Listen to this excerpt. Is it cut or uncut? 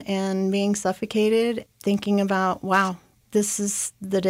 uncut